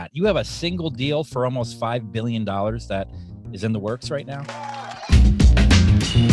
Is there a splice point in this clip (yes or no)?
yes